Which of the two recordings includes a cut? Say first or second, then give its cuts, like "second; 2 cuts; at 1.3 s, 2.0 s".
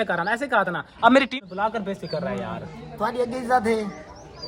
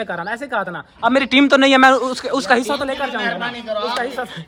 first; 1 cut; at 1.3 s